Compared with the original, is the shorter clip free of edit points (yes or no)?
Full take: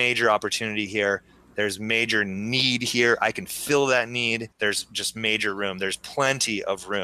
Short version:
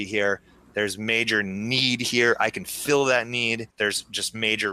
yes